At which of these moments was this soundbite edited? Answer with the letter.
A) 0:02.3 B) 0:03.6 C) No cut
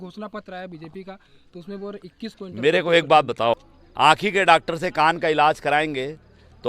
B